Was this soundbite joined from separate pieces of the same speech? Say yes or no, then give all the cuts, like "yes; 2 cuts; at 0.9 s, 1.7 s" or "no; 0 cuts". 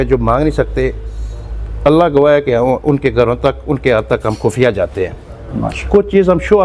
no; 0 cuts